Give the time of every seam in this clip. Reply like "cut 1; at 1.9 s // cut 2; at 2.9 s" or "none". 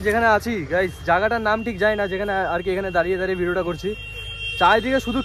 none